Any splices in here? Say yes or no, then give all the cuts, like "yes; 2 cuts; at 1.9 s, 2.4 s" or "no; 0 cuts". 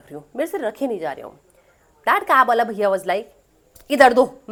no; 0 cuts